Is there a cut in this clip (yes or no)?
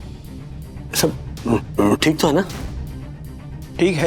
no